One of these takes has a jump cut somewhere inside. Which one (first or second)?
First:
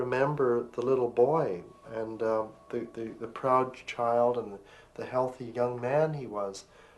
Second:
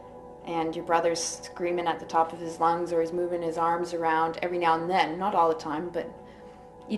first